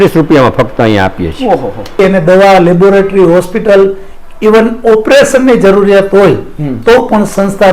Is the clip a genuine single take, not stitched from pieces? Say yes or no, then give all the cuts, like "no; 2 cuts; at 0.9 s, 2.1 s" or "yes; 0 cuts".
no; 1 cut; at 2.0 s